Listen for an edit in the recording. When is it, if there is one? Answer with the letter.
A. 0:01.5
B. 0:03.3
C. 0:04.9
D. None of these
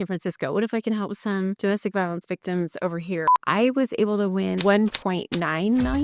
B